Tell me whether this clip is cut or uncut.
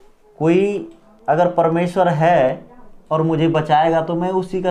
uncut